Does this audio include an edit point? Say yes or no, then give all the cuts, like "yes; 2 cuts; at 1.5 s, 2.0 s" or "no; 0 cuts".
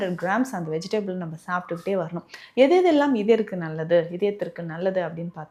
no; 0 cuts